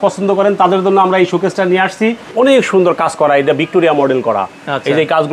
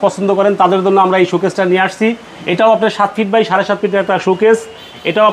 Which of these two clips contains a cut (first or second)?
first